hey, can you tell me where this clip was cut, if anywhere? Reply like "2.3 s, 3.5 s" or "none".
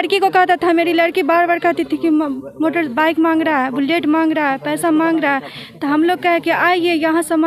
none